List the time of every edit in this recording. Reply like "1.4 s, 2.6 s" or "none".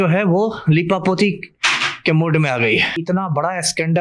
3.0 s